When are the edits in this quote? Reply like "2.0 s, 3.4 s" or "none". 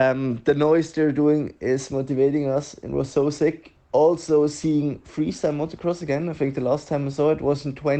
none

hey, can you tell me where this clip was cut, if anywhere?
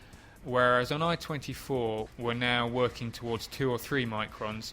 2.1 s

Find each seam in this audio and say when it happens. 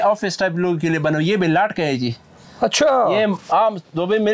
none

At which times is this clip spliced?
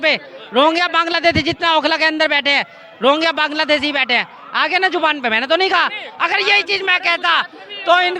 none

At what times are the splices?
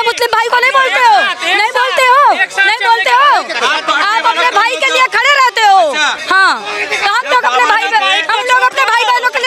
none

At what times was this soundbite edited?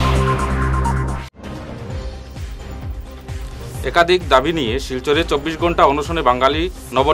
0.9 s

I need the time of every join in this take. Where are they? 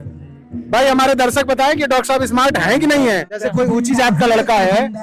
3.4 s

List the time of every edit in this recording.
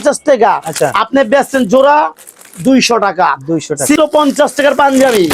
4.0 s

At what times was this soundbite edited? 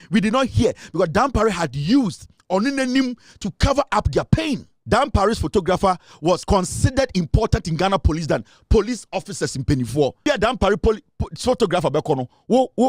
4.7 s, 6.4 s, 10.2 s

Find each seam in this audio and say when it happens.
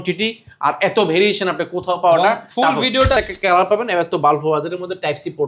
3.2 s

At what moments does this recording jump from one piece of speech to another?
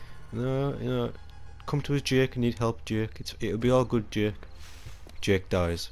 none

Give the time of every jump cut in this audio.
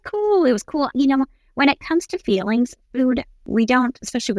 0.9 s, 3.4 s

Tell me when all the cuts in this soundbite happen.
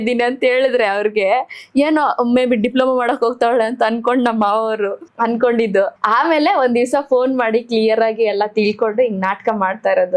5.0 s, 6.0 s

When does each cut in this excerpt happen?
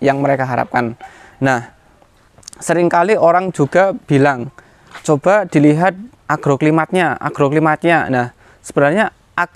none

